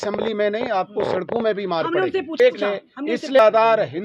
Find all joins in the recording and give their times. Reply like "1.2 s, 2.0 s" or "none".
2.6 s